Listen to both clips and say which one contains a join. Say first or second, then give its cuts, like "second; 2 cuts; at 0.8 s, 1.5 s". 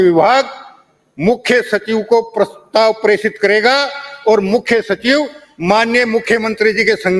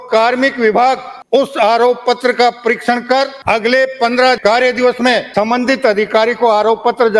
second; 4 cuts; at 1.1 s, 3.4 s, 4.4 s, 5.3 s